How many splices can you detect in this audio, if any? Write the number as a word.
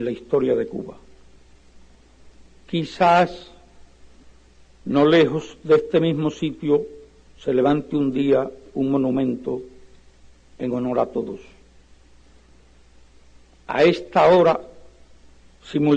one